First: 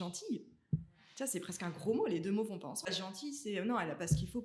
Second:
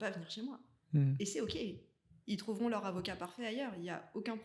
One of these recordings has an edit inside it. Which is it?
first; 1 cut; at 2.8 s

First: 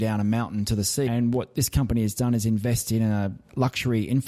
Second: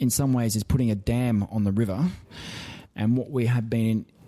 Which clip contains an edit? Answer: first; 2 cuts; at 1.1 s, 3.4 s

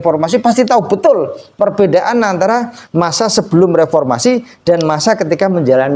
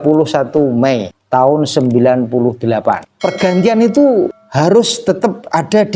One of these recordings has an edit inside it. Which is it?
second; 3 cuts; at 1.1 s, 3.1 s, 4.4 s

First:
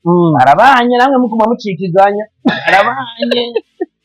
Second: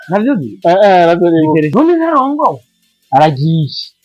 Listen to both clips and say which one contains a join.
second; 1 cut; at 1.7 s

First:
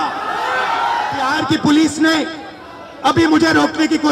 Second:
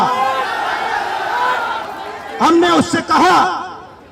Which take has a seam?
first; 1 cut; at 1.3 s

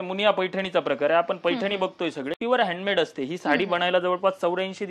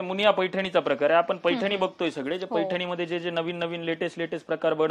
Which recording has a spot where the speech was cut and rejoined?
first; 1 cut; at 2.4 s

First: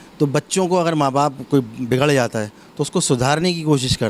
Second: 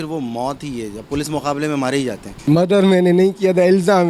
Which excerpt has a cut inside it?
second; 1 cut; at 2.4 s

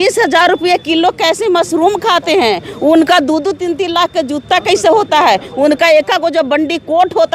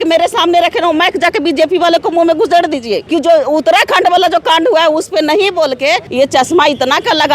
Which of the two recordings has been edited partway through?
second; 2 cuts; at 3.0 s, 6.1 s

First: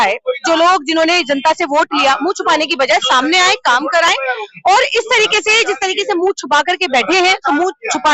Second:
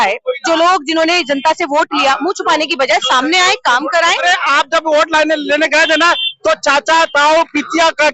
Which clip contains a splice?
second; 1 cut; at 4.2 s

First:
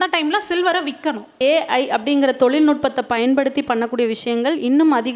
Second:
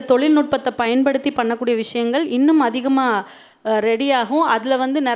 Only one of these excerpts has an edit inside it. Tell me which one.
first; 1 cut; at 1.4 s

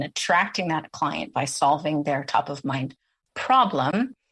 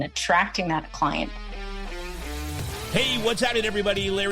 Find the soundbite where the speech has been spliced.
second; 1 cut; at 1.1 s

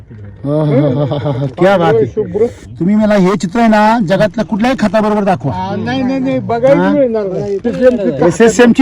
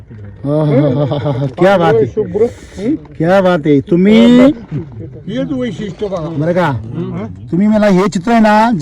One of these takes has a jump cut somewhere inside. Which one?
first; 2 cuts; at 2.6 s, 7.6 s

